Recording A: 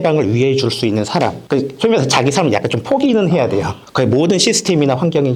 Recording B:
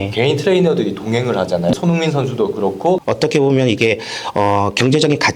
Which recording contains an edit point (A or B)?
B